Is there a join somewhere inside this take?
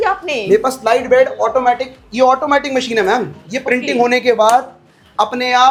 no; 0 cuts

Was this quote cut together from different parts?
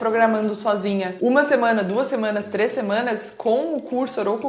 yes; 1 cut; at 1.1 s

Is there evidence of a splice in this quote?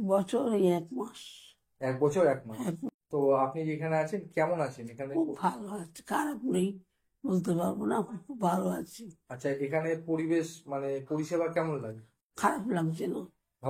yes; 1 cut; at 2.9 s

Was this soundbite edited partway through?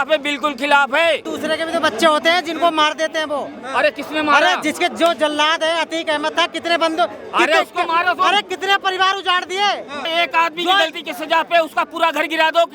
yes; 2 cuts; at 1.3 s, 10.0 s

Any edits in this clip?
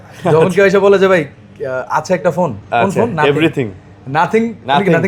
no; 0 cuts

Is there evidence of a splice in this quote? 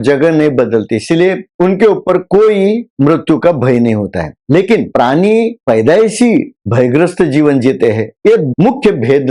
no; 0 cuts

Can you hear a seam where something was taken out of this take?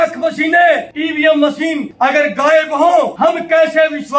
yes; 3 cuts; at 0.9 s, 1.9 s, 3.1 s

